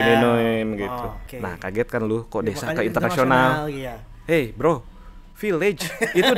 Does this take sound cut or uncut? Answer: cut